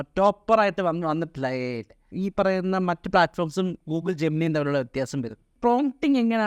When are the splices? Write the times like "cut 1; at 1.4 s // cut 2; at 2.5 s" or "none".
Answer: cut 1; at 2.0 s // cut 2; at 5.5 s